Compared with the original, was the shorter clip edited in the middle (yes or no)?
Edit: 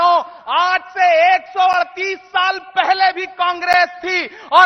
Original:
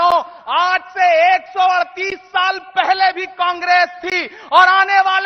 no